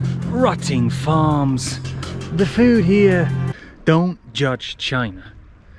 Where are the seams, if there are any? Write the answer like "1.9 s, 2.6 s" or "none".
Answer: 3.4 s